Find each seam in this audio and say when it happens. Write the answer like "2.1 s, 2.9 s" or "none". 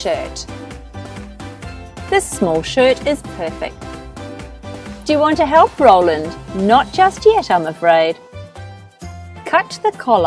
none